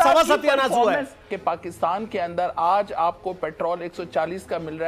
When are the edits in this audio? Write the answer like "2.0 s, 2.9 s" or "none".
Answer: none